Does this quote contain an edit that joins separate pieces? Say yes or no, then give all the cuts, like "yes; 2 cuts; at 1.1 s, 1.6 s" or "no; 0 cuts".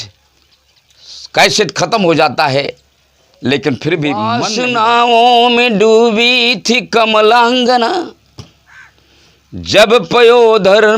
yes; 1 cut; at 4.5 s